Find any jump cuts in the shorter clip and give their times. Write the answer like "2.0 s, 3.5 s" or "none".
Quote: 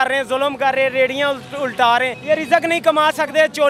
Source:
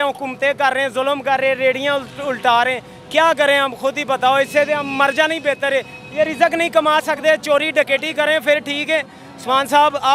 2.1 s